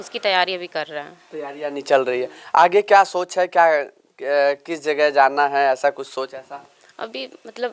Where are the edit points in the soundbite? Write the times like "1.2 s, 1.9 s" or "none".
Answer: none